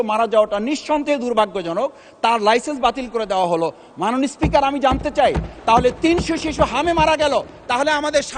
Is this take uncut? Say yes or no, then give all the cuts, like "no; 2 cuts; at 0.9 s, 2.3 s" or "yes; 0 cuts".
yes; 0 cuts